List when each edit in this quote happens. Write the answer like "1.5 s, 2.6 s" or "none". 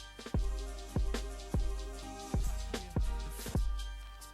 1.2 s